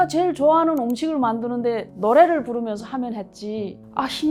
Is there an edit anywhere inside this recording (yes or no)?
no